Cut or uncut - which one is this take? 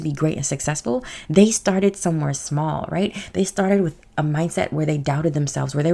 uncut